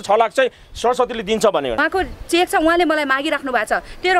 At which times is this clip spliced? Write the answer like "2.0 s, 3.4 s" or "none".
1.8 s

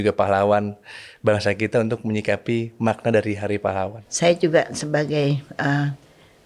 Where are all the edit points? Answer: 4.0 s

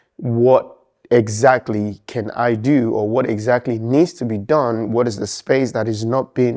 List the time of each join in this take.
none

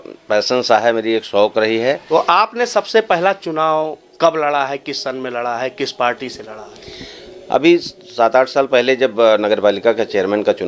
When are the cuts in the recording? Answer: 2.0 s

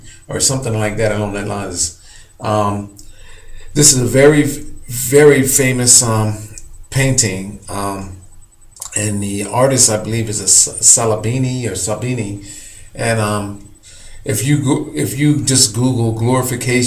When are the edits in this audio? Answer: 13.3 s

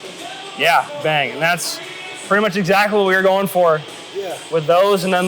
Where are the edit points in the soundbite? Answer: 0.9 s

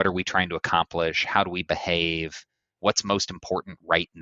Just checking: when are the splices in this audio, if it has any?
none

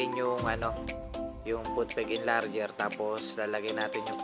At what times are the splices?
none

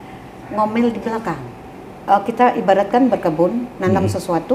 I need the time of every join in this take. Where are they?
1.7 s

